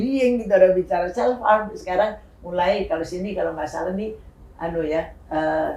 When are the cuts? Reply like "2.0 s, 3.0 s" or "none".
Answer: none